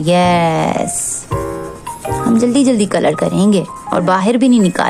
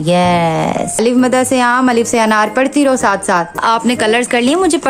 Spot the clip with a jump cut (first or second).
second